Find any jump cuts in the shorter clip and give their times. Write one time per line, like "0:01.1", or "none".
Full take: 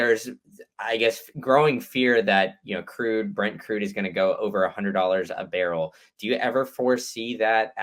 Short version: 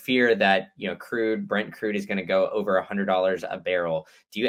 none